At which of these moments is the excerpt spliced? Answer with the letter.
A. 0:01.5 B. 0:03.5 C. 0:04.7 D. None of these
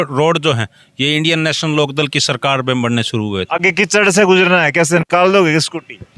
B